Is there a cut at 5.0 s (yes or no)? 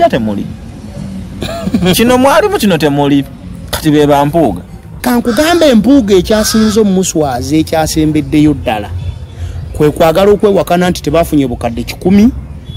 yes